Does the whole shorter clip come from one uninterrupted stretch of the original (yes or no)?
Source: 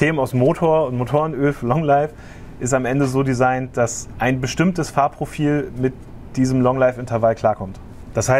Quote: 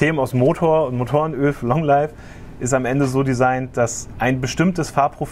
yes